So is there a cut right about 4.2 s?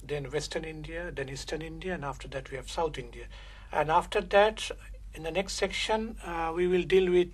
no; 1 cut; at 1.1 s

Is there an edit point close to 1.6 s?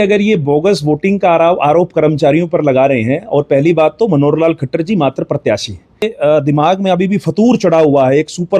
no; 1 cut; at 6.1 s

